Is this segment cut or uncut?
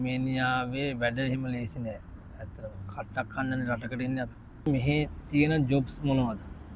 cut